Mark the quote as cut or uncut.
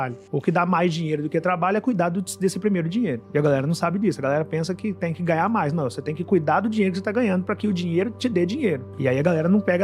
uncut